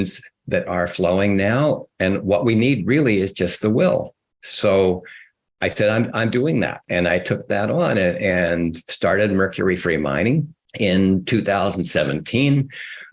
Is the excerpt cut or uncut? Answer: cut